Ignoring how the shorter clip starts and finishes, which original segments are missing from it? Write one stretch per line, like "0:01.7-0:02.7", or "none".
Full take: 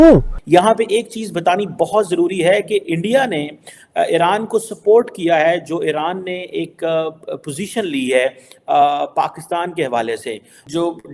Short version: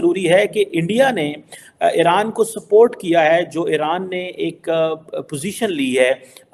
none